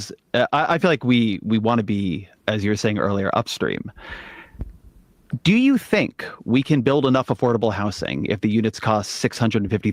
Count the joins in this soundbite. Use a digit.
0